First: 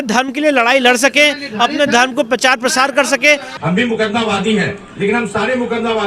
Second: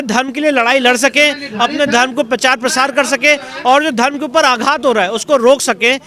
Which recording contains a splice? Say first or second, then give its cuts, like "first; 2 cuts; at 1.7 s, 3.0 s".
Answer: first; 1 cut; at 3.5 s